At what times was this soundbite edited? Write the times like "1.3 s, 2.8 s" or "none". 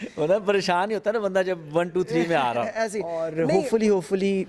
3.3 s